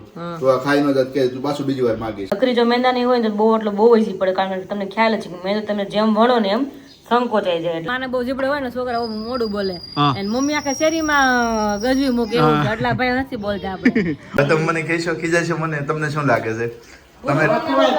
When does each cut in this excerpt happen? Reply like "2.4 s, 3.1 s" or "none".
2.3 s, 7.9 s, 14.4 s